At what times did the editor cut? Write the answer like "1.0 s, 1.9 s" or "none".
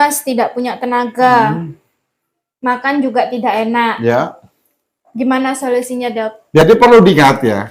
6.6 s